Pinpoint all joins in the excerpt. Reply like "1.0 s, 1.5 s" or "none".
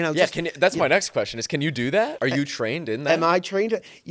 2.1 s